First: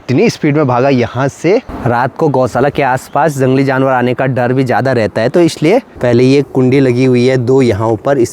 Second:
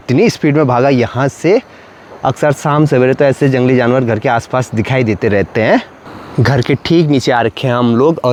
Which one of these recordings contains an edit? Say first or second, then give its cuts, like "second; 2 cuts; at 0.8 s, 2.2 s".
first; 2 cuts; at 1.7 s, 5.9 s